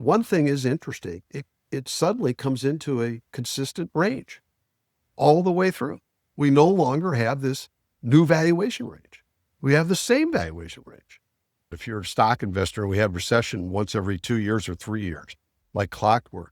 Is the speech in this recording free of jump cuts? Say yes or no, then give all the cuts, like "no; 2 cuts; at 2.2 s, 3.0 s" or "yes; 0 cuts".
no; 1 cut; at 11.6 s